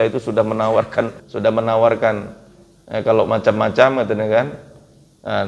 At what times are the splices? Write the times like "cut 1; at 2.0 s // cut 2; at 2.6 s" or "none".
cut 1; at 1.2 s